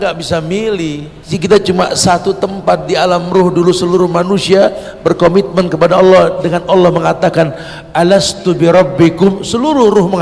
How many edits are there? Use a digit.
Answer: 1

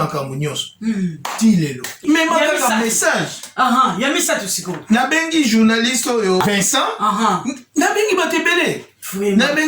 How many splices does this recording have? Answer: 2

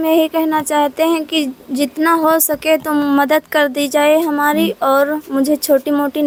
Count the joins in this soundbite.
0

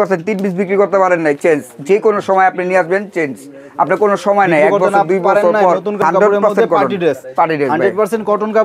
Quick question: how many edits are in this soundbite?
1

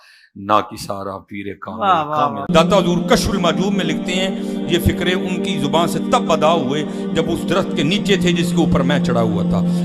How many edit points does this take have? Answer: 1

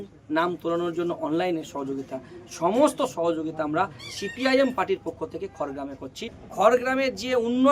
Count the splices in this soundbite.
1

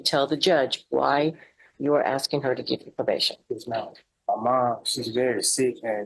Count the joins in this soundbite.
1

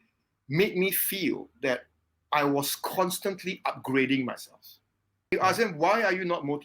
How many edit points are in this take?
1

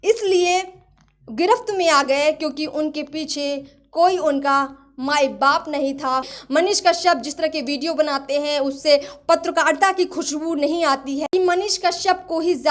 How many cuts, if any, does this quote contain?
2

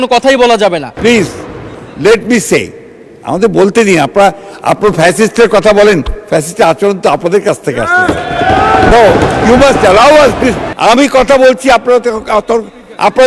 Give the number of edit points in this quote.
2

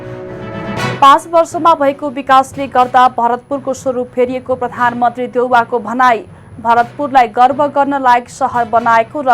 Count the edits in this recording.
1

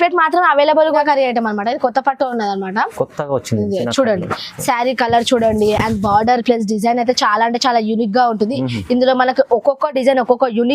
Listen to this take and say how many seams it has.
1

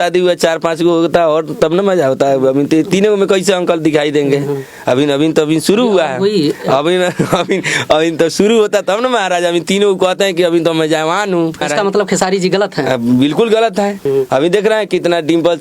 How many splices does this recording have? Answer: 2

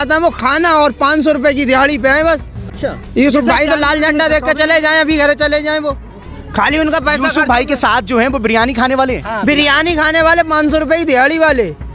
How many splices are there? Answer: 0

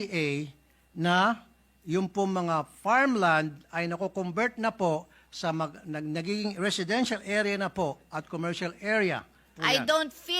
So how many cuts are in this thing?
1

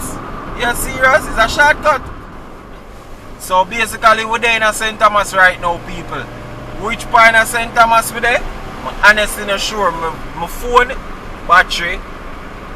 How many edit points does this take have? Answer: 1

